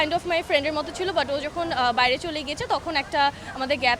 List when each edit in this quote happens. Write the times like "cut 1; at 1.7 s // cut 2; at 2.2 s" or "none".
none